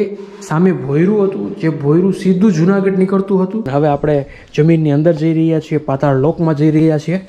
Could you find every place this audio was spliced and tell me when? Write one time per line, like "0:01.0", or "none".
0:03.7